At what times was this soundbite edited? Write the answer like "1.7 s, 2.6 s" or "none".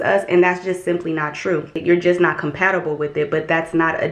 1.7 s